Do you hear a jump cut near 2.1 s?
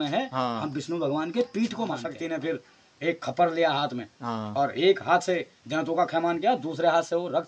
yes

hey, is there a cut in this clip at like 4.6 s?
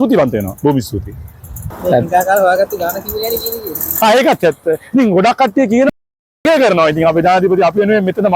no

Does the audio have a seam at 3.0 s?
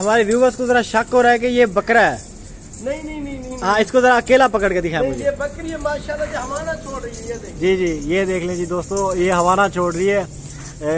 no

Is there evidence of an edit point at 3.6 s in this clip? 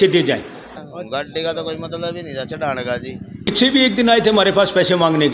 yes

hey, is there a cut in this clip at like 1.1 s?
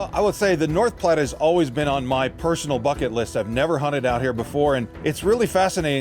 no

